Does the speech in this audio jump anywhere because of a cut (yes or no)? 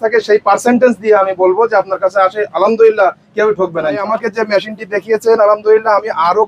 yes